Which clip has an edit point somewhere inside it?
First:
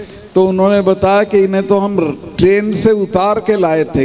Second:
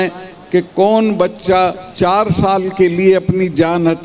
second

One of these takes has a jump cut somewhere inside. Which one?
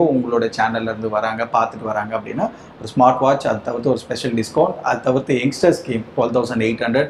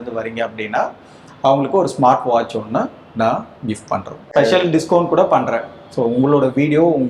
second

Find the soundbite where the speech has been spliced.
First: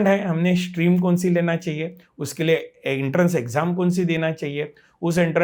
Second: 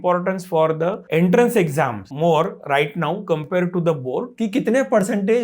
second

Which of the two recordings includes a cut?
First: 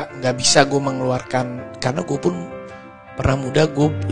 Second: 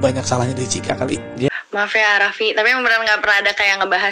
second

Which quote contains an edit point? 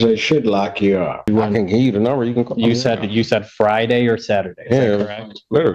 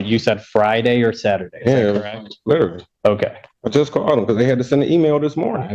first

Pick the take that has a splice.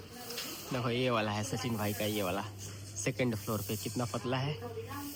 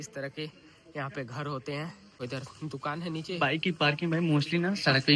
second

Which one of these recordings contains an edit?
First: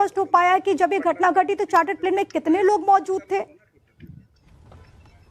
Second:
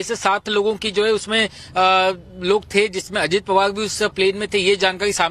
first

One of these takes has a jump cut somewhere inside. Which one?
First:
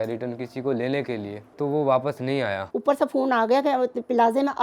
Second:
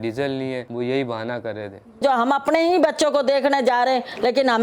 first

